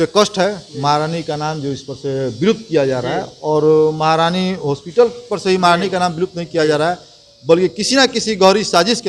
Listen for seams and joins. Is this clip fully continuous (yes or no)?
yes